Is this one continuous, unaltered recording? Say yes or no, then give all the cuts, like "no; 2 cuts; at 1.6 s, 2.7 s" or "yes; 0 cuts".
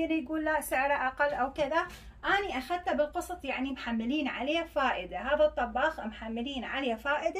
yes; 0 cuts